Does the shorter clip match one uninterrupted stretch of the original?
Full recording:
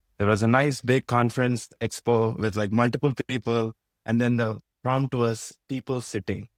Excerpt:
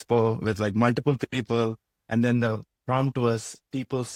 yes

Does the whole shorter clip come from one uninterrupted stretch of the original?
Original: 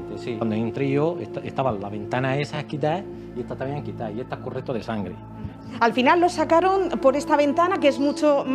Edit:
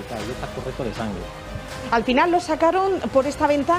yes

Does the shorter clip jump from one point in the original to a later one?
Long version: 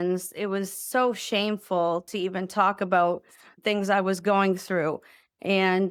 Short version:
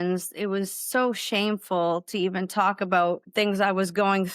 yes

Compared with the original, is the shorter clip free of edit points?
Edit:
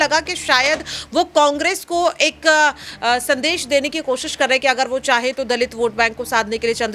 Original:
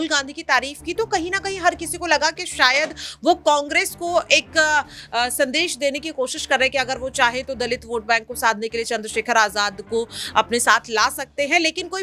yes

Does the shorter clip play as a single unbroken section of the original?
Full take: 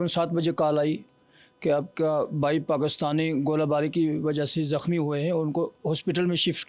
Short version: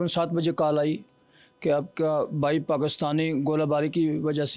yes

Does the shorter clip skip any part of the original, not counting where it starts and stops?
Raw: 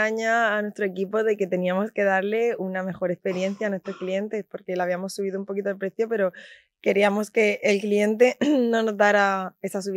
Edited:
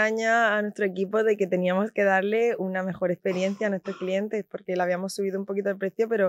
no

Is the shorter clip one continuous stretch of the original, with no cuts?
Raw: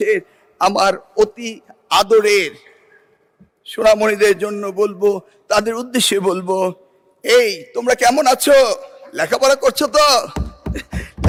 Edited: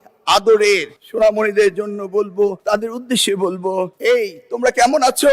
no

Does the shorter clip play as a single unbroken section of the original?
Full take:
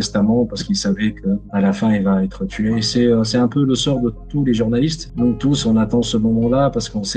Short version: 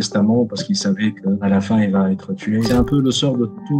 no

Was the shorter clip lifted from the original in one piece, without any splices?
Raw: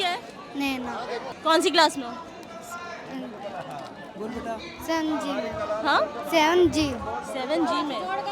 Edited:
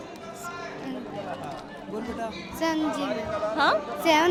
yes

